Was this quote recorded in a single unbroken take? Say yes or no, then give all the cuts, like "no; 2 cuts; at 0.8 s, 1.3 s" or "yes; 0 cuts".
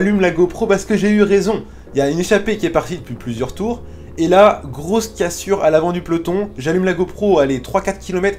yes; 0 cuts